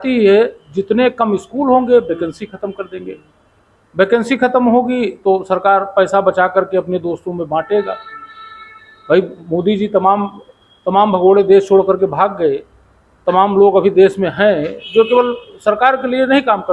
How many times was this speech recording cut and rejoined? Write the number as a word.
zero